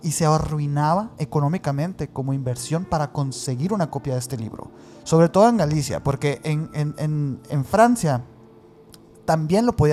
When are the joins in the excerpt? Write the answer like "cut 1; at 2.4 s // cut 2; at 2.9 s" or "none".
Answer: none